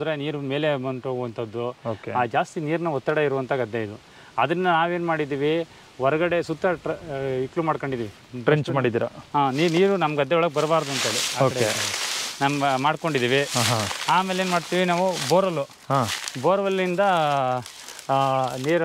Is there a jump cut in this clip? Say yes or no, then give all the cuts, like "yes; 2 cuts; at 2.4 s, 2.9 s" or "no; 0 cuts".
no; 0 cuts